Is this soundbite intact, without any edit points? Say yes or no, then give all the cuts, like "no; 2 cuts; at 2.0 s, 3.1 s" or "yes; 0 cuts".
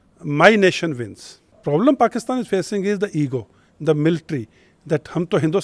no; 1 cut; at 1.6 s